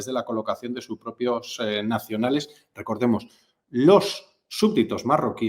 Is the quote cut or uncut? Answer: uncut